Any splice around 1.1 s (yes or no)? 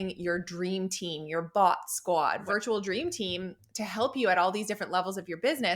no